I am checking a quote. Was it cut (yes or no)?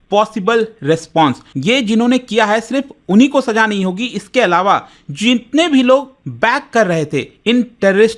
yes